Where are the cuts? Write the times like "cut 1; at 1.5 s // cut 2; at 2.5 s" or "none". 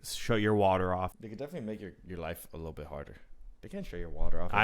cut 1; at 1.1 s

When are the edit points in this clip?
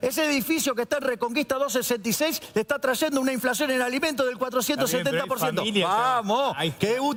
none

